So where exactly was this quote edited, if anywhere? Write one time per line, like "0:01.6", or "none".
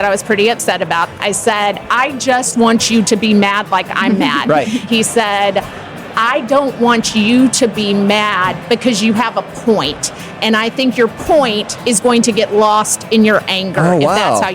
0:01.2
0:04.9